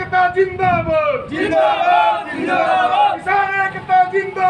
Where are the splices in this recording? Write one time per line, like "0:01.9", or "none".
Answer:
none